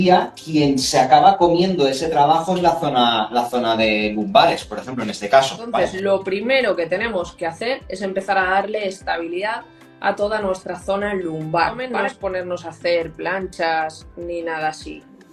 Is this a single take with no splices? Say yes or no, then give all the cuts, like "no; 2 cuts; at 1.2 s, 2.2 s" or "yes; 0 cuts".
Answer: no; 2 cuts; at 5.7 s, 11.8 s